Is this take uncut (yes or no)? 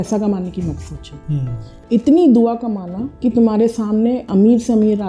yes